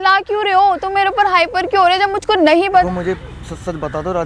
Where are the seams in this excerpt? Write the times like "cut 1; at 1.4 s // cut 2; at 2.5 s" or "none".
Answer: cut 1; at 2.8 s